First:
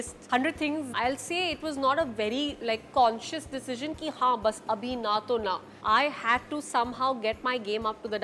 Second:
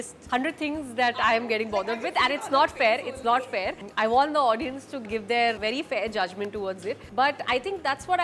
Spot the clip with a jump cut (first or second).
first